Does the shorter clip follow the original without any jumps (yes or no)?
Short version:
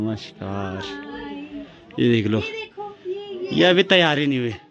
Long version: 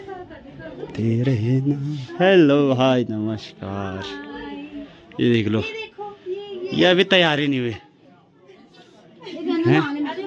yes